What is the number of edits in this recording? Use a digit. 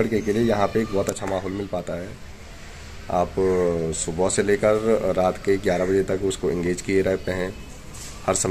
0